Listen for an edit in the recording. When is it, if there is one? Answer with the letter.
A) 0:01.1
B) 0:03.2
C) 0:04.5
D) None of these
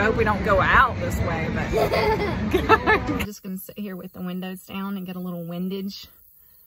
B